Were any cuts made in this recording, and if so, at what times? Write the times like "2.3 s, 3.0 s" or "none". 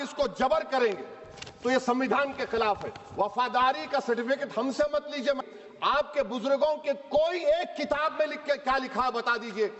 5.4 s